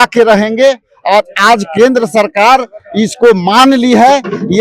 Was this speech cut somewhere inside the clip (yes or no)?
no